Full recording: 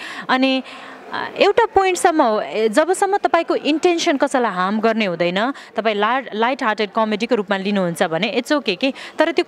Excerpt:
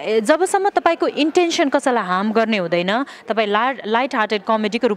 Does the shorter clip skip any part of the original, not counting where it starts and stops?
no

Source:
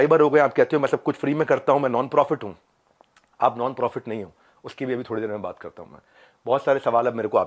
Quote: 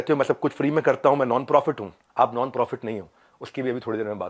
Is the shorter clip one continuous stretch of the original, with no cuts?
no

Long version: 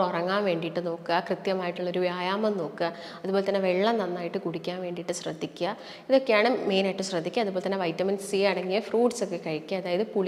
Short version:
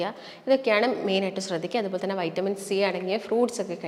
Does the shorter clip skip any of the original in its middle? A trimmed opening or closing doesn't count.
no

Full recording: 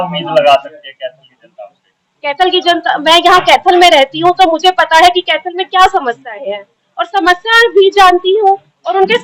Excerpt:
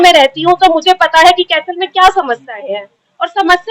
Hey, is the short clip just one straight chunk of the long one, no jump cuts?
yes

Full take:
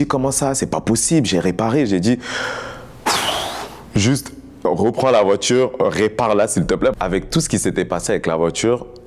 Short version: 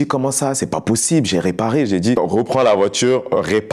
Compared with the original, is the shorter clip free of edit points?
no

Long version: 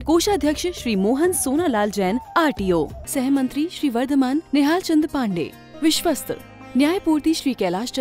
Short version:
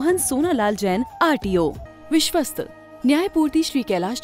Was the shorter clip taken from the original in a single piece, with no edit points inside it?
no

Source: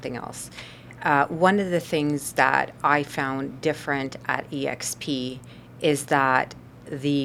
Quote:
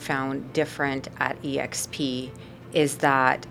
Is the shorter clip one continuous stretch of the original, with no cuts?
yes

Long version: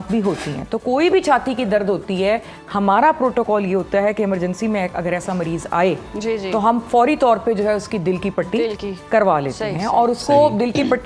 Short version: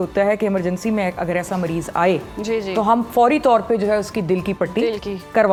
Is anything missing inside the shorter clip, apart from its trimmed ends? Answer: no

